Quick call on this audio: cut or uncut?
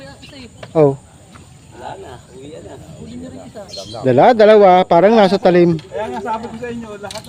uncut